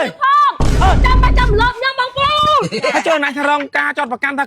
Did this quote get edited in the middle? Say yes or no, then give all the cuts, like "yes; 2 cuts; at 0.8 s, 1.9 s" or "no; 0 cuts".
yes; 1 cut; at 2.7 s